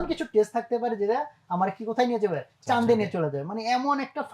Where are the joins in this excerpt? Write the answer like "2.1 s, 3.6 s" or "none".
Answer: none